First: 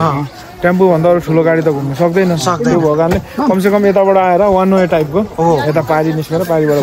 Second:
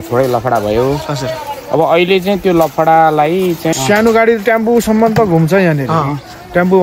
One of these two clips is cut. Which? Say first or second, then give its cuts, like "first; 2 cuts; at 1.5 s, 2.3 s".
second; 1 cut; at 3.7 s